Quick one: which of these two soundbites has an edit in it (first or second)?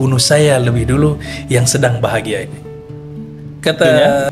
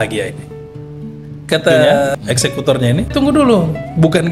second